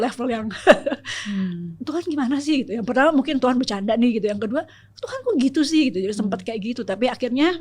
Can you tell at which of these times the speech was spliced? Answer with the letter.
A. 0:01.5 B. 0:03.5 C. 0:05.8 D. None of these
D